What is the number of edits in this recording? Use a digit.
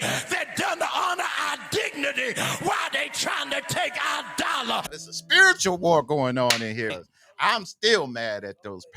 2